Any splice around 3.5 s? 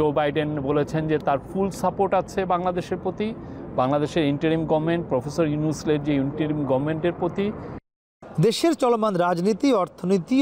no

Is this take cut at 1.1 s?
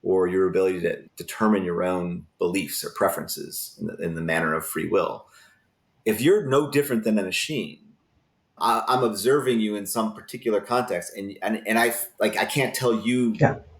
yes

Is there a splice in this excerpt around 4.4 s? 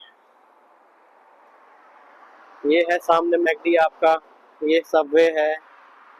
no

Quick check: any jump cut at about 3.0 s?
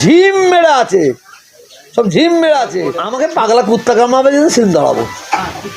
yes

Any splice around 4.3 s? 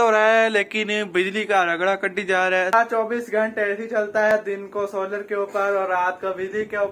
yes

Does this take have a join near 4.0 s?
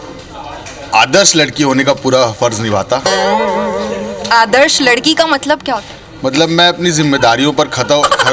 no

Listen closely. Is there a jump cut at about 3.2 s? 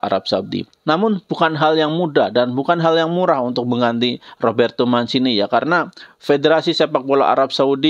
no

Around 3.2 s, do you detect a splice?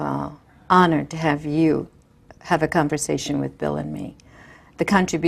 yes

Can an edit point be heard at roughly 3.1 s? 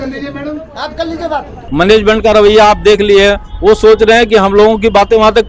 no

